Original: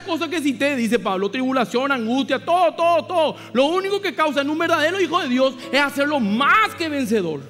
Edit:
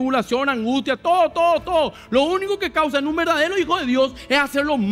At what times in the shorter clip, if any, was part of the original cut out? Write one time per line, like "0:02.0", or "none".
none